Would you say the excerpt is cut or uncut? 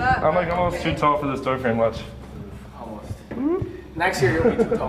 uncut